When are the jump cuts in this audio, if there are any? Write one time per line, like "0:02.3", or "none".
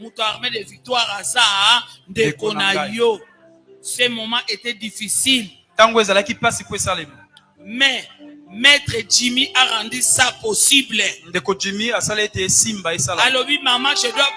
none